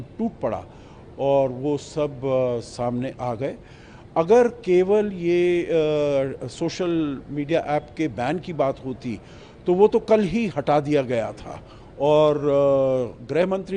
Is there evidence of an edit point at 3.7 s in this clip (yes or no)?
no